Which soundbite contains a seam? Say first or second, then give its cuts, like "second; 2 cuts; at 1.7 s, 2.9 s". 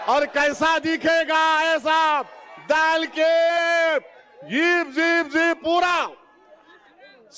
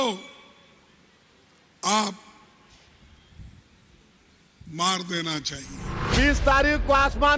second; 1 cut; at 6.1 s